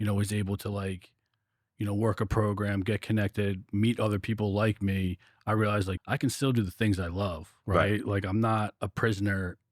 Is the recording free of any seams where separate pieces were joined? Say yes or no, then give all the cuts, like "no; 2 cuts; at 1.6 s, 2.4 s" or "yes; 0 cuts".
no; 1 cut; at 5.9 s